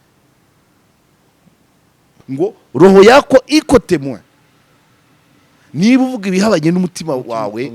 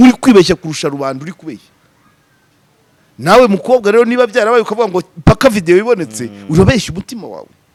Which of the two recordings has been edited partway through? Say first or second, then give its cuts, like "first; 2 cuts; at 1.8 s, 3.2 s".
first; 1 cut; at 2.1 s